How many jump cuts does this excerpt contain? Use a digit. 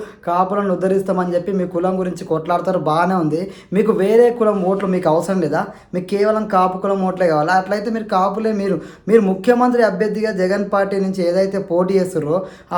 0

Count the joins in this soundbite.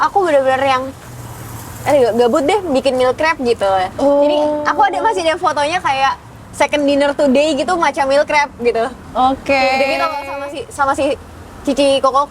0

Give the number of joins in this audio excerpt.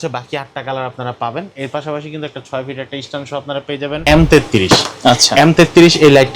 1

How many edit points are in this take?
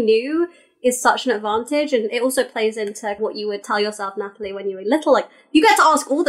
1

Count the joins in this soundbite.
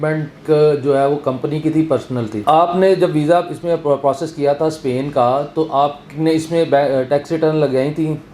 1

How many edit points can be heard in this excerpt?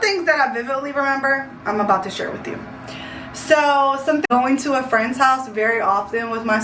1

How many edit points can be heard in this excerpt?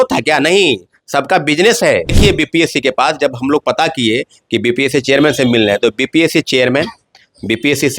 1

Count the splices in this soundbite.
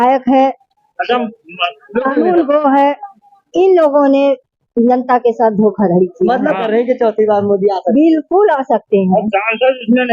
1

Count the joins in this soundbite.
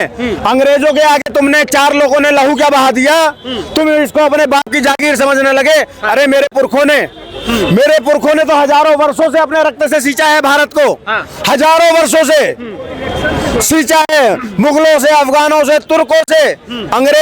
0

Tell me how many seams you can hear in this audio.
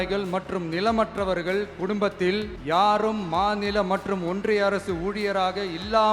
1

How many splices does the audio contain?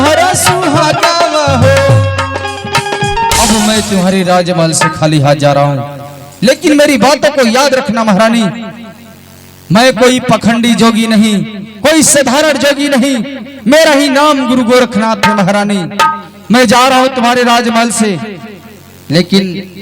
1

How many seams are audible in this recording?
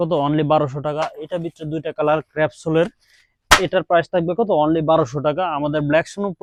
0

